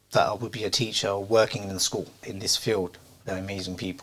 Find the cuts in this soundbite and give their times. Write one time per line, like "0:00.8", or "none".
0:02.3